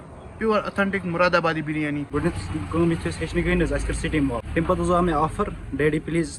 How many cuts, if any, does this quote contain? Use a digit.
2